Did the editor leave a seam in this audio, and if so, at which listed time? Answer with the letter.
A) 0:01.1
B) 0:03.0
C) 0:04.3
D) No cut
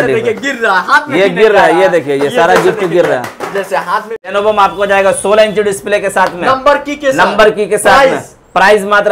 C